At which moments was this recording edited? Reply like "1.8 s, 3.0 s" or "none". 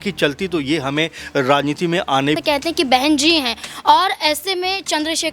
2.4 s